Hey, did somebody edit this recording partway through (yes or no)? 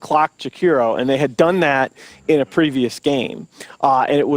yes